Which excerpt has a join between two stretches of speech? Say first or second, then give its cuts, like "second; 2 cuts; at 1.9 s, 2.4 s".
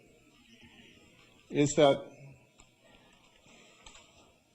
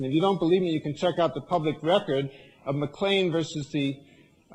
first; 1 cut; at 3.2 s